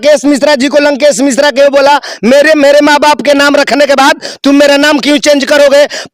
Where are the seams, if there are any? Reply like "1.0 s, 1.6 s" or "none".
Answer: none